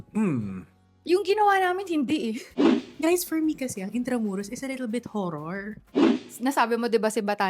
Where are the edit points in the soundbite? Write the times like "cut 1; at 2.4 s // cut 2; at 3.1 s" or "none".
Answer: cut 1; at 2.5 s // cut 2; at 6.0 s